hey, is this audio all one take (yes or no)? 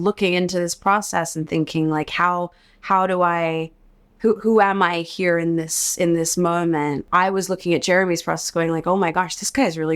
no